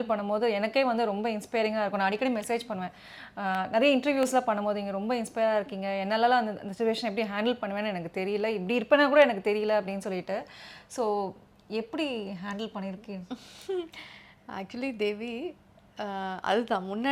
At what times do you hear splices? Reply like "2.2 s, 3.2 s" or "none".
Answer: none